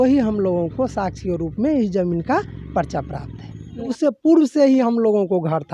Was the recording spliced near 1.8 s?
no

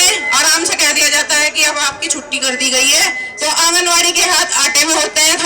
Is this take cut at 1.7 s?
no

